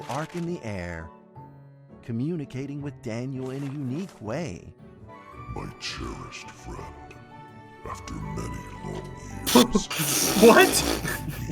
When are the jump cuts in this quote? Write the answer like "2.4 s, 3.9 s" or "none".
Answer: 5.1 s